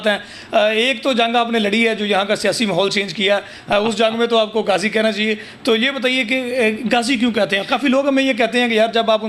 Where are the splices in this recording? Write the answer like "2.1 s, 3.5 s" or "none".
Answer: none